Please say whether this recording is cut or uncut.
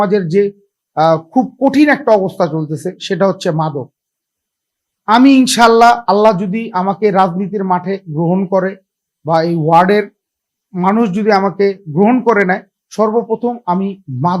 uncut